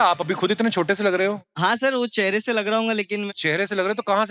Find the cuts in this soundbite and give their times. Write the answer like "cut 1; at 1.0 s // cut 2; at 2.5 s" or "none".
cut 1; at 1.4 s // cut 2; at 3.3 s